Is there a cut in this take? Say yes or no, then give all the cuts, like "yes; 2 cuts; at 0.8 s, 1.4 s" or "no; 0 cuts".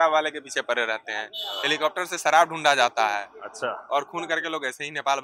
no; 0 cuts